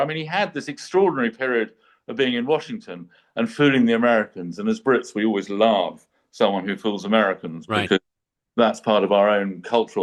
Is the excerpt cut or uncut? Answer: uncut